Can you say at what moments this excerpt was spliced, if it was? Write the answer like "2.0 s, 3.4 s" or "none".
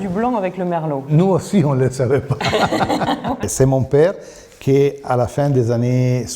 none